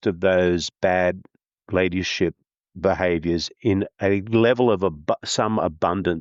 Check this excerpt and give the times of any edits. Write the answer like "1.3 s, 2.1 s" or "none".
none